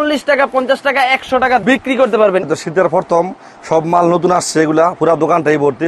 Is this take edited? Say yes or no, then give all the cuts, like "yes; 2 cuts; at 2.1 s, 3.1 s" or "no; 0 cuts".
yes; 1 cut; at 2.5 s